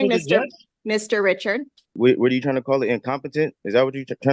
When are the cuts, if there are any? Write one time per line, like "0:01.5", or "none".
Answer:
0:02.0